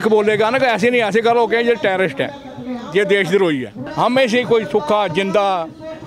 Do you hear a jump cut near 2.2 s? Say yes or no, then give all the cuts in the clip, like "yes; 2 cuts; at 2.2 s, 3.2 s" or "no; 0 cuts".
no; 1 cut; at 3.8 s